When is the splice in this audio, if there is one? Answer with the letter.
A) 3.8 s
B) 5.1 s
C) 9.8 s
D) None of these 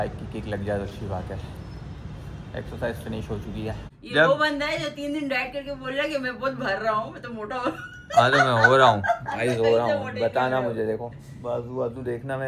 A